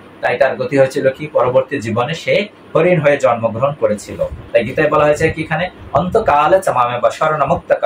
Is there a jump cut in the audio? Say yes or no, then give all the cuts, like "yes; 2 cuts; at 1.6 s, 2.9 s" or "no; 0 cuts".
yes; 1 cut; at 4.4 s